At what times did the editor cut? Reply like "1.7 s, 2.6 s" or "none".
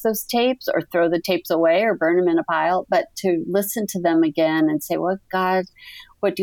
none